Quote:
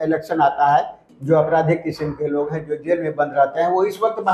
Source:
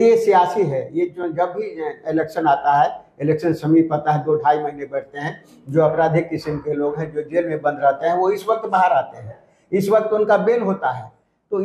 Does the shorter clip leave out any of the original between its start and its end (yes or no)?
yes